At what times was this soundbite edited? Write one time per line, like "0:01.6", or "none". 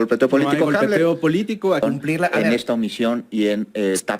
0:01.8